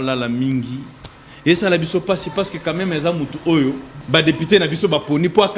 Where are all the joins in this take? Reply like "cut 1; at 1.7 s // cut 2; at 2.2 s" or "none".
cut 1; at 3.9 s